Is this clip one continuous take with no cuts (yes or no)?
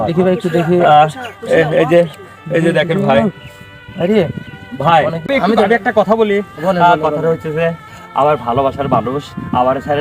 no